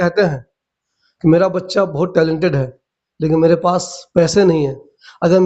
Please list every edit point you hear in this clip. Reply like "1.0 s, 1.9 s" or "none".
none